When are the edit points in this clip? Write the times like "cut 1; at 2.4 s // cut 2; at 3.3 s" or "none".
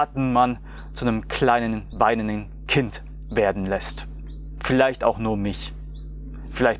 none

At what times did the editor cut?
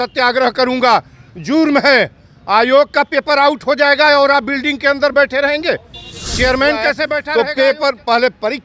cut 1; at 7.3 s

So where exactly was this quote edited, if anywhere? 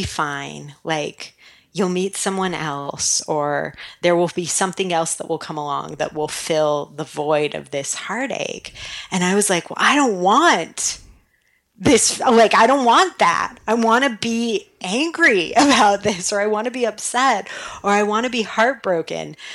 none

